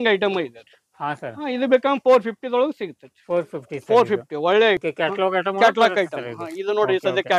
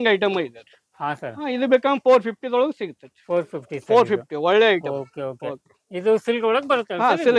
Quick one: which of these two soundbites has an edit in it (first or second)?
first